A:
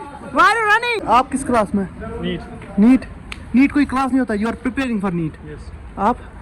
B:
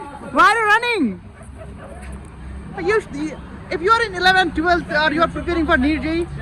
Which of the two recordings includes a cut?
A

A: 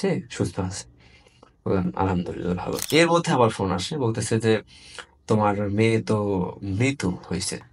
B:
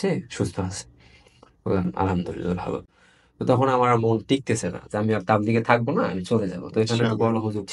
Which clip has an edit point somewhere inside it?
A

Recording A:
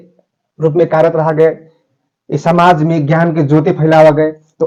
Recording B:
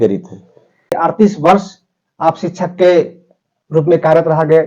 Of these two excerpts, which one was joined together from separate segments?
B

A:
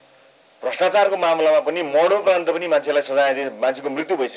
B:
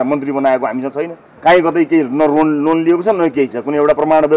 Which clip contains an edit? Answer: B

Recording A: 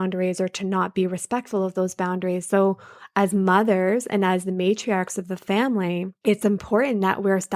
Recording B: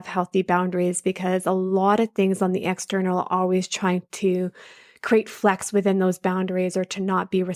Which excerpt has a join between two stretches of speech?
A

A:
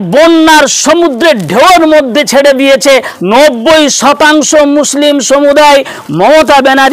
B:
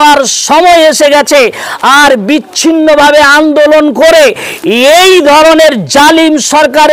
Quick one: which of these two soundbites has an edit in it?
A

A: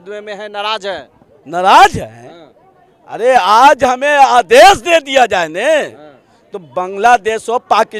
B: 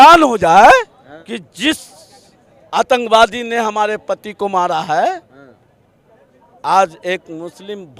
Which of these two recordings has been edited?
B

